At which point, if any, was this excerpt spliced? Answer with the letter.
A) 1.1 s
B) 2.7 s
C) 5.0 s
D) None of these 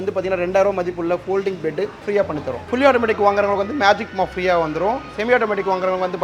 B